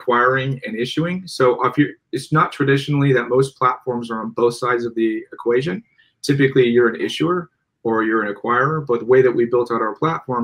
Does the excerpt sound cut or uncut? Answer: uncut